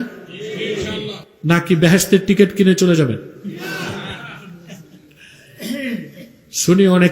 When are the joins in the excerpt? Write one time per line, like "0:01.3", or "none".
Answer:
0:01.2